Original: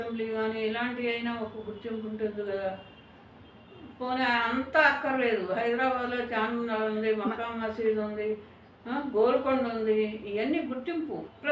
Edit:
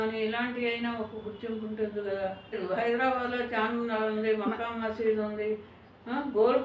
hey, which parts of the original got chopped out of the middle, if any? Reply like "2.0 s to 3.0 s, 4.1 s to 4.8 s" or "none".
3.0 s to 5.4 s

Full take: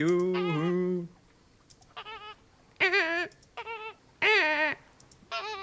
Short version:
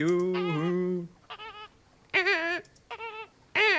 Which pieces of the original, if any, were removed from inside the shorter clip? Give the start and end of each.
1.2 s to 1.9 s

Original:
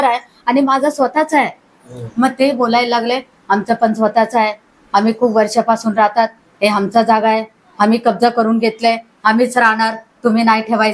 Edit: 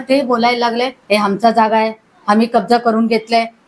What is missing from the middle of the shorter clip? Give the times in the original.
3.3 s to 6.5 s

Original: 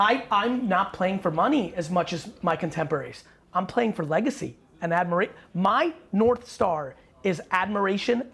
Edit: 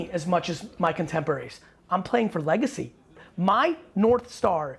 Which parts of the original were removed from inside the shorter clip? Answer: 4.8 s to 5.3 s

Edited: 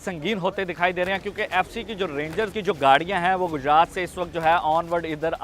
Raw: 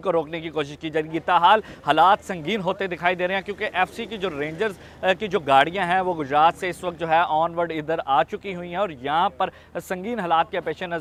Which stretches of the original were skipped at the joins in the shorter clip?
4.8 s to 5.2 s

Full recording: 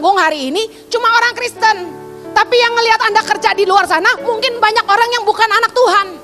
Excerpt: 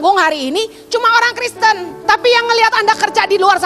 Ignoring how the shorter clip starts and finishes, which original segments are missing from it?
1.9 s to 2.2 s

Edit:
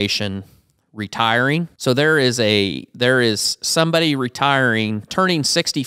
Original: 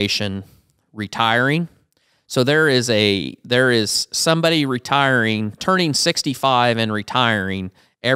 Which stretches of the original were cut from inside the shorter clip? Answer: 1.7 s to 2.2 s

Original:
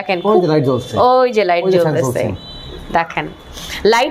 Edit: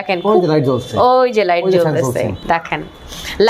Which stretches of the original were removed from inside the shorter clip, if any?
2.4 s to 2.8 s

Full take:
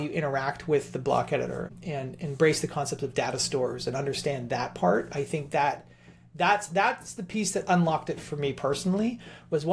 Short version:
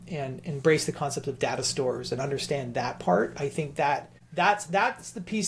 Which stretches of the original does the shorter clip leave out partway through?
5.9 s to 6.2 s

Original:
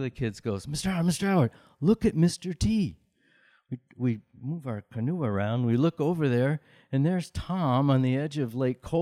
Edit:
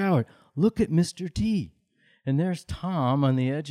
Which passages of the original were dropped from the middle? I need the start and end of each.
3.3 s to 6.7 s

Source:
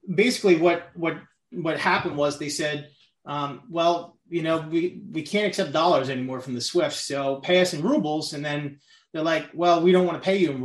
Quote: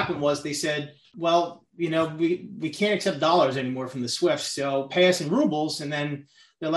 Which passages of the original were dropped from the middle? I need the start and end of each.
3.0 s to 3.6 s

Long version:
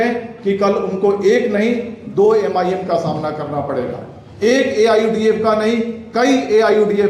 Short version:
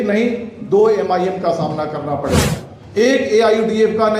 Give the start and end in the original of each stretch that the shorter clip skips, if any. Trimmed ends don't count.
none

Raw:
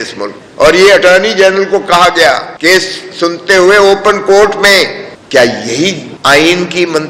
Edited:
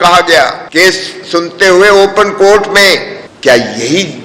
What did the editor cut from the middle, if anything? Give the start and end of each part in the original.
none

